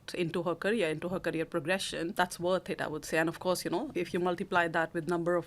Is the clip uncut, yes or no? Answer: no